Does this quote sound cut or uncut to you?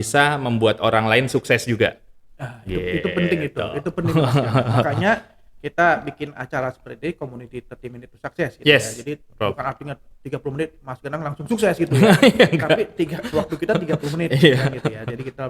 uncut